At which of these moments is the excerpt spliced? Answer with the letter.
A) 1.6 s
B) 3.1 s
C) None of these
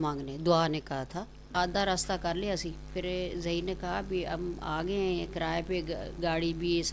A